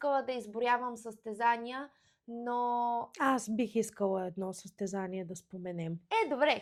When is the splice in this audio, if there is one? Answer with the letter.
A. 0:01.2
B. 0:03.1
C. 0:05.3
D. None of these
D